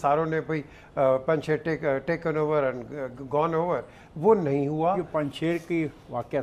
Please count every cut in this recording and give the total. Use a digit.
1